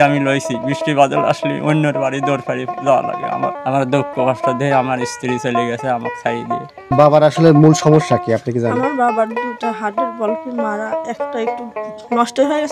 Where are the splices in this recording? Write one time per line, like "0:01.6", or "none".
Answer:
0:03.6
0:06.9